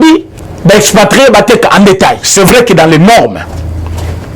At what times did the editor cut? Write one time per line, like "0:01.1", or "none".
0:02.2